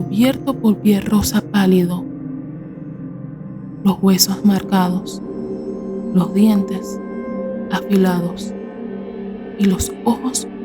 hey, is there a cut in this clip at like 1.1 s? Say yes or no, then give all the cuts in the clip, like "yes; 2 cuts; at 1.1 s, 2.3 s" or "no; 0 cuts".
no; 2 cuts; at 8.3 s, 9.6 s